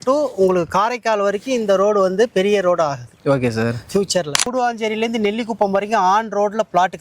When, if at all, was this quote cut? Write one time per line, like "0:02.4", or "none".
0:04.4

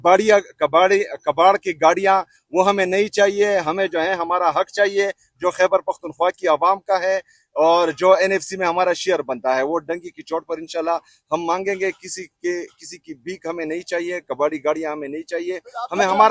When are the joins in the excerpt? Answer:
none

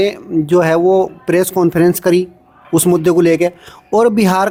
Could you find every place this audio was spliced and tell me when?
none

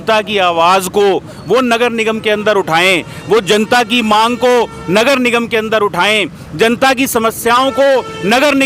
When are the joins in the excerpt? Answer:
none

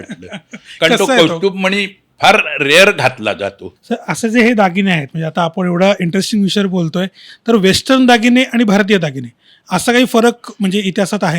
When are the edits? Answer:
0:03.7

